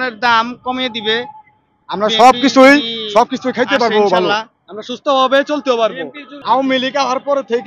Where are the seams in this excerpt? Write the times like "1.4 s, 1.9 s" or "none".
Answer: none